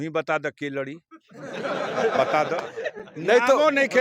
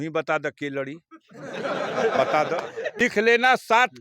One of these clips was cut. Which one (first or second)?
second